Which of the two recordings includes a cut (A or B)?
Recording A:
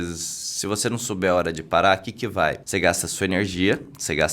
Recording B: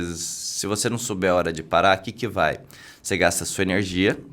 A